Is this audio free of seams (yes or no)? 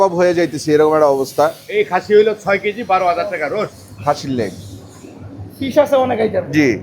no